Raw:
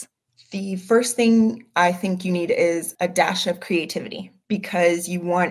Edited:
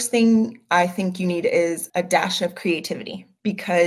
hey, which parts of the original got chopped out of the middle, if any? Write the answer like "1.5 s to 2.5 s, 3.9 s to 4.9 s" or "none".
none